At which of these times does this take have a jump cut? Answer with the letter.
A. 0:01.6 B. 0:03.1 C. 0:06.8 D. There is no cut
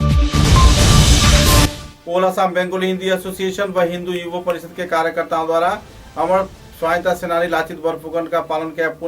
A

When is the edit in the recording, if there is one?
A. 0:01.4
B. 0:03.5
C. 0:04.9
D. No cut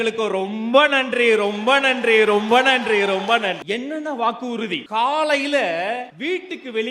B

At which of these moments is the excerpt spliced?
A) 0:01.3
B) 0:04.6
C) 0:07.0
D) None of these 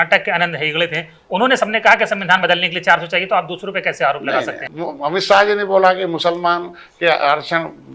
B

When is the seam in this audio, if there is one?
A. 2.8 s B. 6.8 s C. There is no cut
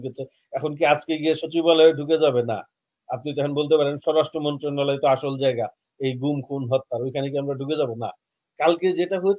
C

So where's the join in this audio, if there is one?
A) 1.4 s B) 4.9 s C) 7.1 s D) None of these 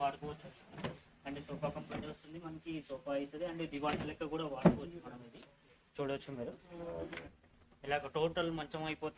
C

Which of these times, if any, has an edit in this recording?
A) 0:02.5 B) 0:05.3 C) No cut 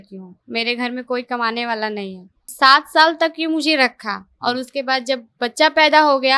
A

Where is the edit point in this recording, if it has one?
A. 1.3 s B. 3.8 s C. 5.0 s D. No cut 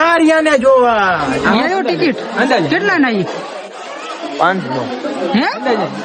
A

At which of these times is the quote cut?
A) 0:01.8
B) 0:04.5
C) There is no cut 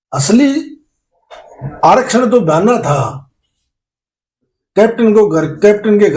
C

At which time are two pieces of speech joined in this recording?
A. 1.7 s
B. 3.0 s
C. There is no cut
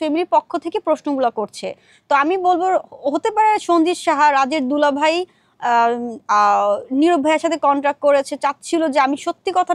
C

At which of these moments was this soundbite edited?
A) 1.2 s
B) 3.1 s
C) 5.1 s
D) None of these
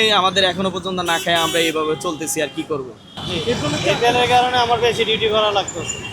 B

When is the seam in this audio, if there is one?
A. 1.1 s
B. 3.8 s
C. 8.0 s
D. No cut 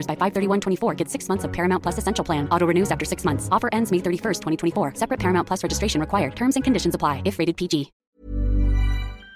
C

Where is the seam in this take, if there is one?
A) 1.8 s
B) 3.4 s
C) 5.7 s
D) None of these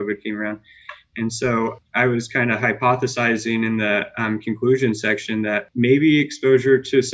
C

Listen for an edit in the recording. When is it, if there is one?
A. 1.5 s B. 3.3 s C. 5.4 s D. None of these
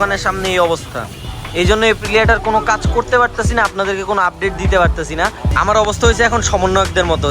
C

